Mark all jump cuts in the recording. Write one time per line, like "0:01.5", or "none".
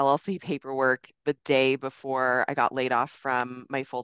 none